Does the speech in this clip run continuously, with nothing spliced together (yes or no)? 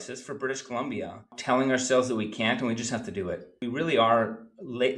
no